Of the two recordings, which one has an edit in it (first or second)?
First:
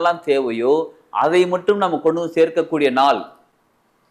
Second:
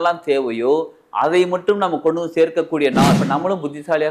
second